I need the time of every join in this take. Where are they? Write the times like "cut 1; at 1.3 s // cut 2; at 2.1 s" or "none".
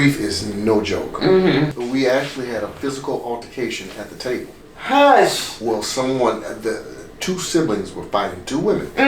cut 1; at 1.8 s

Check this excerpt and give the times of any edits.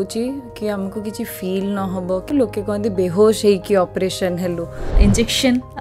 cut 1; at 2.2 s // cut 2; at 4.9 s

